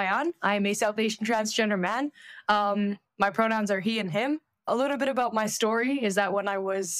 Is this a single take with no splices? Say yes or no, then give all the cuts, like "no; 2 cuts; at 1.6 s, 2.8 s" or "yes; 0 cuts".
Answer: yes; 0 cuts